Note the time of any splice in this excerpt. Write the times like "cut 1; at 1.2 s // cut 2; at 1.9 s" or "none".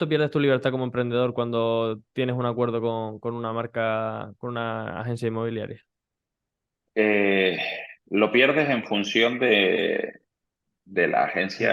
none